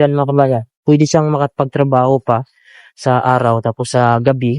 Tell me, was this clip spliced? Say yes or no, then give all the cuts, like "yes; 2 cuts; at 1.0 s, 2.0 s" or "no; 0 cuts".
no; 0 cuts